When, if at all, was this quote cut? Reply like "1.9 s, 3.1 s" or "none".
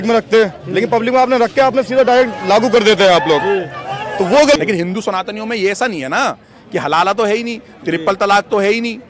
4.6 s